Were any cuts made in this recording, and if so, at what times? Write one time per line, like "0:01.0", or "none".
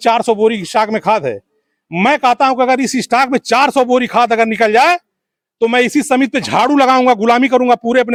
none